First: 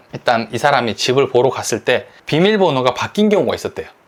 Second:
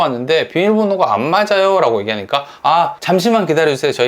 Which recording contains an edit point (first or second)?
second